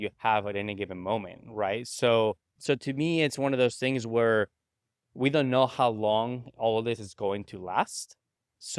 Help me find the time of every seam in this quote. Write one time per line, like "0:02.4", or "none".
0:02.5